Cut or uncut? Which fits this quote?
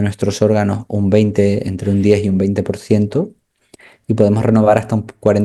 uncut